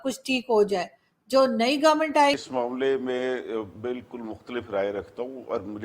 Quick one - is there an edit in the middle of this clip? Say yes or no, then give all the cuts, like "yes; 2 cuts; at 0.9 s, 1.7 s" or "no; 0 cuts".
yes; 1 cut; at 2.4 s